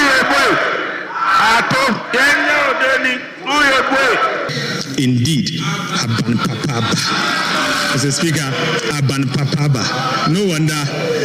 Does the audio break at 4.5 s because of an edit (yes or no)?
yes